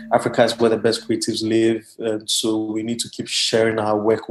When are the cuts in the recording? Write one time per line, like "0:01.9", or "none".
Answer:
none

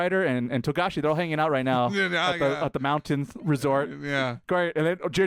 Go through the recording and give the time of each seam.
none

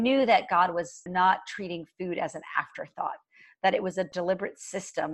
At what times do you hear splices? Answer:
0:01.0
0:04.1

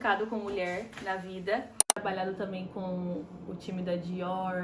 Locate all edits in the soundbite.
0:02.0

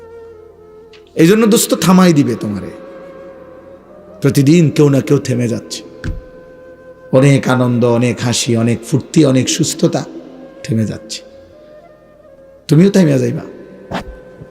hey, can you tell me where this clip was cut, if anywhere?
0:01.0

